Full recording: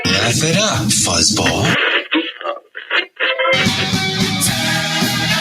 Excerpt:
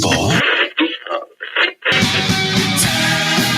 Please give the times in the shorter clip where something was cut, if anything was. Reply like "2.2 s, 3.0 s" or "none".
1.9 s